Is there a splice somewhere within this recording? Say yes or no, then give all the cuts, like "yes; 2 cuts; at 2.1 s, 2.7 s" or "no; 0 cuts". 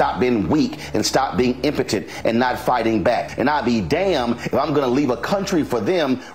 yes; 1 cut; at 3.3 s